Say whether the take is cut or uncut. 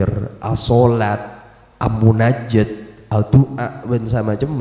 uncut